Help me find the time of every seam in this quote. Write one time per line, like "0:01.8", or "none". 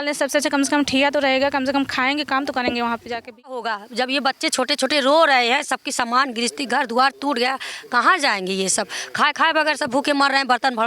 0:03.8